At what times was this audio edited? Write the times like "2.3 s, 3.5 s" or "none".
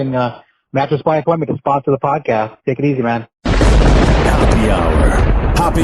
3.3 s

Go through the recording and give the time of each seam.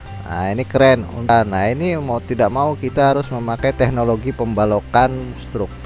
1.3 s

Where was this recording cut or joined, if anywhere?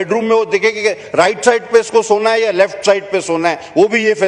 none

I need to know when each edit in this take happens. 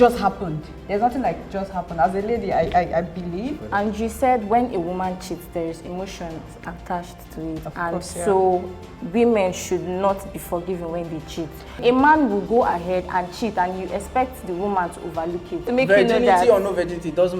3.6 s, 11.8 s, 15.6 s

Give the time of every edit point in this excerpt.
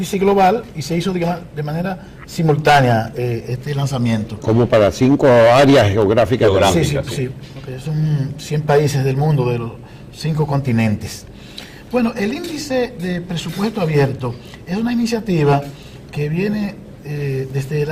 none

